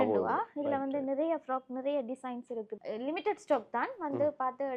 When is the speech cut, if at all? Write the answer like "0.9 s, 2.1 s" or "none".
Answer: 2.8 s